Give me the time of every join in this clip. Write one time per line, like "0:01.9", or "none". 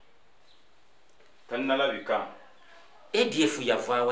none